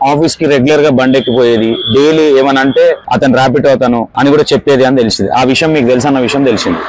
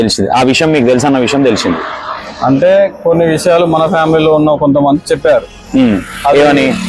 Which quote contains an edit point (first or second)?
first